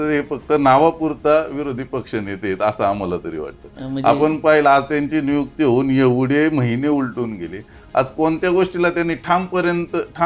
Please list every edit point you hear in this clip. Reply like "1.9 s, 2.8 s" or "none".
none

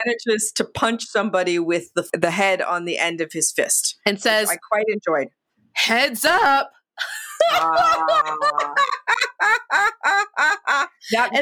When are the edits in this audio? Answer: 2.1 s

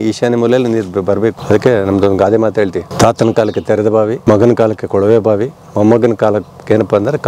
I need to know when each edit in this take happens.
1.4 s, 2.9 s, 4.2 s

